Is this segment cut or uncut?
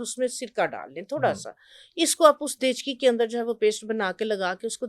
uncut